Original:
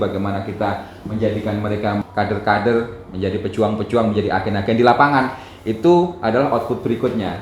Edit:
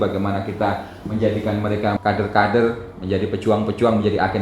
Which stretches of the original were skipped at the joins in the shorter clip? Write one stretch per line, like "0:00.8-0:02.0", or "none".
0:02.0-0:02.1